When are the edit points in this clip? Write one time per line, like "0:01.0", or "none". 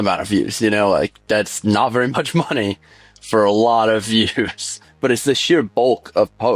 0:04.8

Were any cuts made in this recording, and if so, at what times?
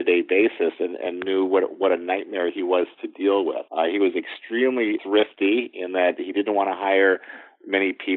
0:03.6
0:05.0

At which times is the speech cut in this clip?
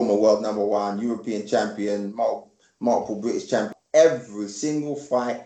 0:03.7

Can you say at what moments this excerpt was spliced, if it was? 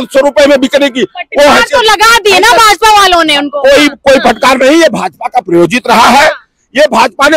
none

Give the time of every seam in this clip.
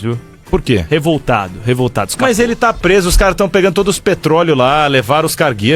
none

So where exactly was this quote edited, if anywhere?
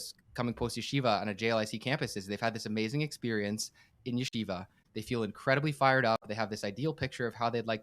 0:04.8

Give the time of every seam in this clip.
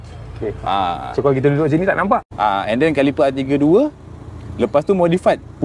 0:02.3

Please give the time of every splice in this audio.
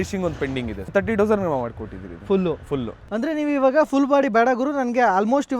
0:00.9
0:02.9

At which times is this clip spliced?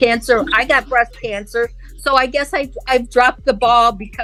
none

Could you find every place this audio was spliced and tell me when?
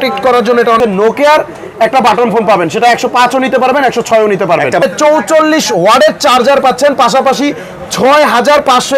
0:00.8
0:04.8

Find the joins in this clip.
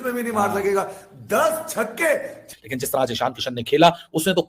0:02.5

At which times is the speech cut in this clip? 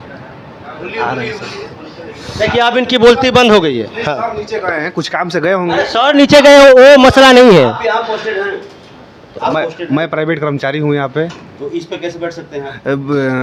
none

